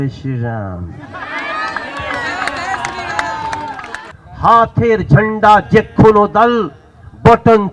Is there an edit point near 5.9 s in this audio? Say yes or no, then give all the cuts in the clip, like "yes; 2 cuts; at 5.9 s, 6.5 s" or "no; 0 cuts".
no; 1 cut; at 4.0 s